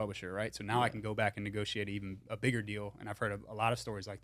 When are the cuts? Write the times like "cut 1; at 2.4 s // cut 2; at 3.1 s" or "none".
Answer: none